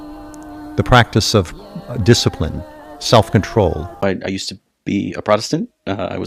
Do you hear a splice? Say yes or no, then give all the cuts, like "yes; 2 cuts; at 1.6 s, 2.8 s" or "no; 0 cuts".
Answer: yes; 1 cut; at 3.9 s